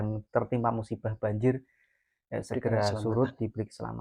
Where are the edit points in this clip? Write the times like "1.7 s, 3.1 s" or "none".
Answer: none

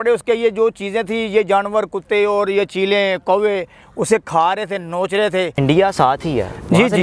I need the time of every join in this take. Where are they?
5.5 s

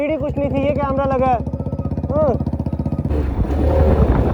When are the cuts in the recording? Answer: 3.1 s

